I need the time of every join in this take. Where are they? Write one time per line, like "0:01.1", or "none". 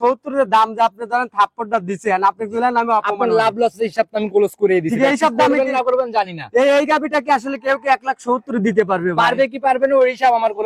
none